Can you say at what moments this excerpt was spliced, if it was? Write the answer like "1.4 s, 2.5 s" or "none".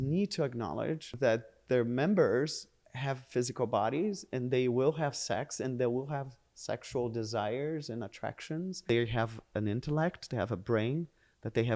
1.1 s, 8.8 s